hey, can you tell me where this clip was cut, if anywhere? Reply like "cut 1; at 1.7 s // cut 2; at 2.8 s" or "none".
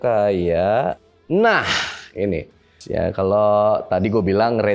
cut 1; at 1.1 s // cut 2; at 2.8 s